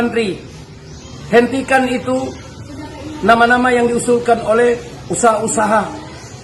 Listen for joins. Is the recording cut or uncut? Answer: uncut